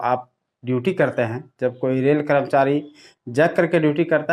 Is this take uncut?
yes; 0 cuts

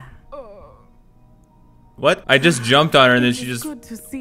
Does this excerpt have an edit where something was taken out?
yes; 1 cut; at 2.2 s

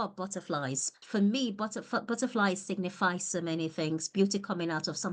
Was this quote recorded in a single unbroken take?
no; 1 cut; at 1.0 s

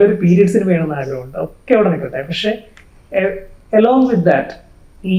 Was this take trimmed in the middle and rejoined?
no; 0 cuts

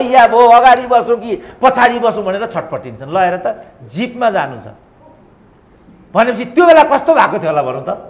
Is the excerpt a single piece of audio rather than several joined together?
yes; 0 cuts

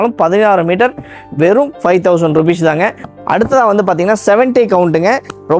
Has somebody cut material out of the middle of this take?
yes; 1 cut; at 3.1 s

